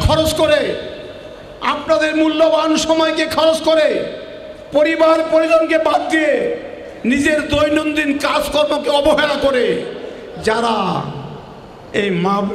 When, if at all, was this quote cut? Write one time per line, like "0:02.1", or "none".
none